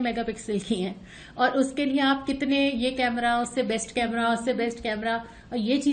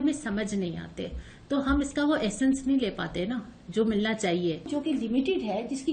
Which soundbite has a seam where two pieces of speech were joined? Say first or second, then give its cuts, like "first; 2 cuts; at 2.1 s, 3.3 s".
second; 1 cut; at 4.7 s